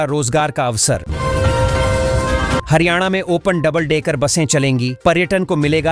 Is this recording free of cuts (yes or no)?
yes